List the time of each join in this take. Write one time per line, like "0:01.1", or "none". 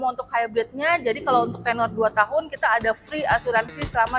none